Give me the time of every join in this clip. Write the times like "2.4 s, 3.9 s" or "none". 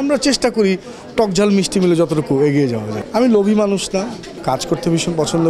3.0 s, 4.3 s